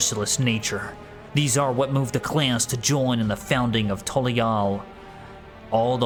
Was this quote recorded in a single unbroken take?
yes; 0 cuts

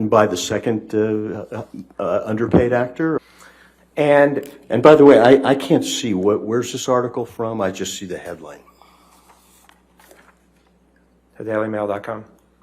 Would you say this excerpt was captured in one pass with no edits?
no; 1 cut; at 3.2 s

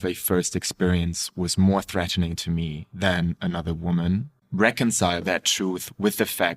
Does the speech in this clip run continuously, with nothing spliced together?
no; 2 cuts; at 4.3 s, 5.2 s

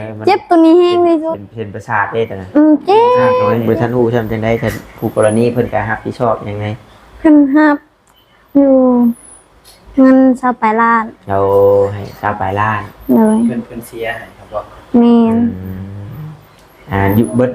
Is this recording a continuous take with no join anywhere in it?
no; 1 cut; at 3.5 s

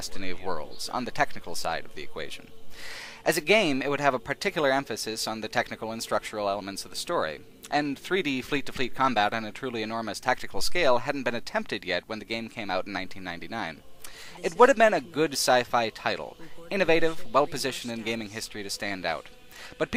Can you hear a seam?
no; 0 cuts

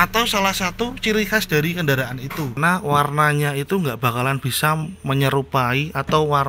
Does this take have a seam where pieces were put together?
yes; 1 cut; at 2.6 s

